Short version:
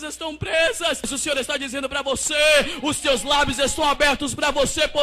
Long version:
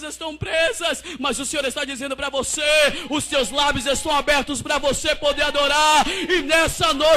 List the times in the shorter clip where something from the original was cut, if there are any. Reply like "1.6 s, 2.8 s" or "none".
1.1 s